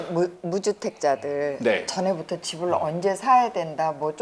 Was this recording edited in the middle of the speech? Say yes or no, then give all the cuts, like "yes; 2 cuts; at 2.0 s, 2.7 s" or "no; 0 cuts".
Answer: no; 0 cuts